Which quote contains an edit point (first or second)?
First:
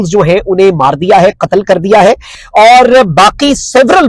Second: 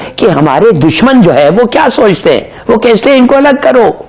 first